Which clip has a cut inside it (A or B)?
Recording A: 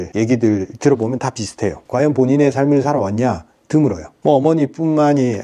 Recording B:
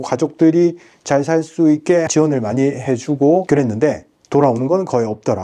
B